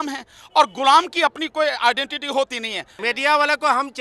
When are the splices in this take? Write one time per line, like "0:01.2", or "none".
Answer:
0:03.0